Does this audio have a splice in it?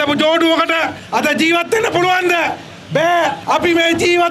yes; 2 cuts; at 1.0 s, 3.4 s

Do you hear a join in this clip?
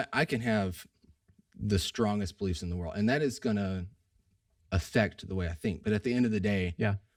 no; 0 cuts

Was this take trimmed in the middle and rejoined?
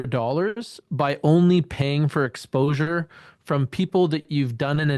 no; 0 cuts

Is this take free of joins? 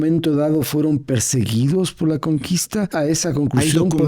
no; 1 cut; at 2.9 s

